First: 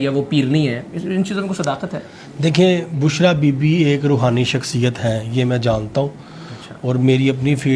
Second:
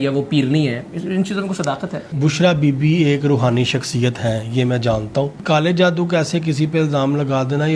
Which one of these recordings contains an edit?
second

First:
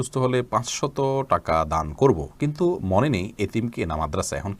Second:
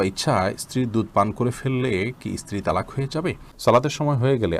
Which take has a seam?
second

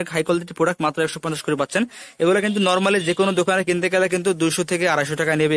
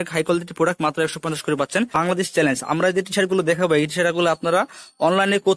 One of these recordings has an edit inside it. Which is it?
second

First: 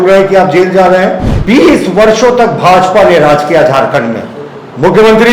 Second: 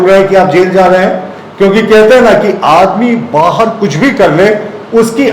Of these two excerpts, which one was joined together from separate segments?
first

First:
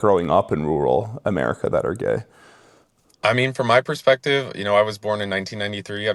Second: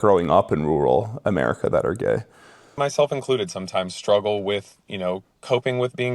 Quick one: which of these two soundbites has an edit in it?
second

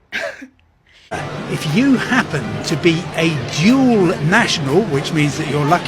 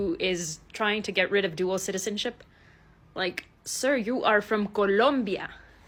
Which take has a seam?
first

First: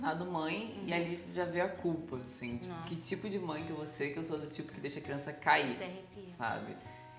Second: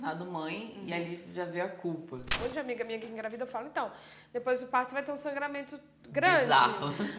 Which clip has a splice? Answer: second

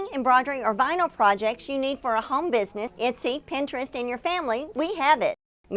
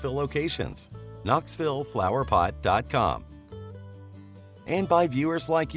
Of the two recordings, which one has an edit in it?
second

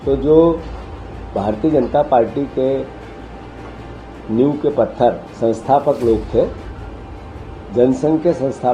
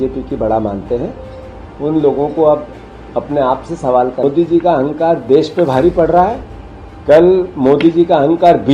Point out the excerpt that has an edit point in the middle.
second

